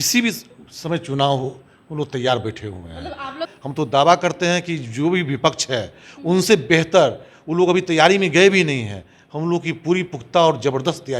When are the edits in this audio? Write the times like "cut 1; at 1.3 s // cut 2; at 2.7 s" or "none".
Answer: cut 1; at 3.5 s

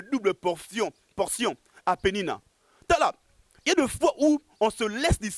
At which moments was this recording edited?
none

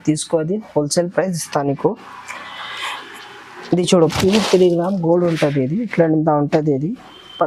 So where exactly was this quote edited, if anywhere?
cut 1; at 4.0 s

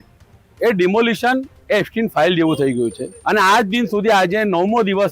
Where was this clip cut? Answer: cut 1; at 3.1 s

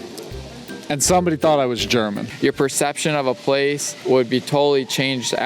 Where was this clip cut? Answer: cut 1; at 2.2 s // cut 2; at 3.9 s

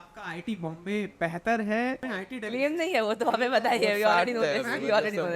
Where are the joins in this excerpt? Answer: cut 1; at 2.0 s

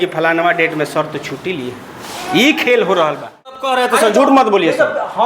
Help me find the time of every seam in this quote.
cut 1; at 3.6 s

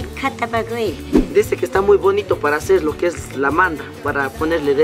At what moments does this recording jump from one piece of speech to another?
cut 1; at 1.2 s

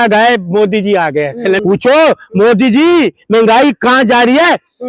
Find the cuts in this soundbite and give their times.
cut 1; at 1.6 s

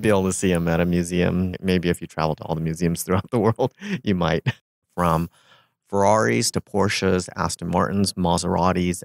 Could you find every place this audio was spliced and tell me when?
cut 1; at 1.6 s // cut 2; at 4.8 s

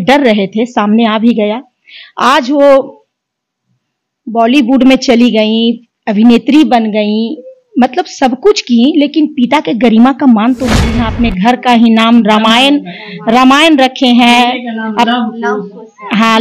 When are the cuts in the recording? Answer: cut 1; at 10.9 s

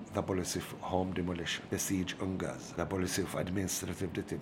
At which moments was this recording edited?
cut 1; at 1.6 s // cut 2; at 2.6 s

